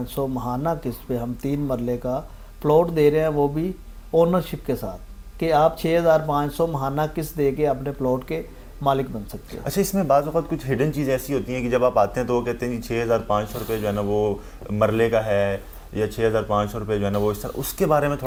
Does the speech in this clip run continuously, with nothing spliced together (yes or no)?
yes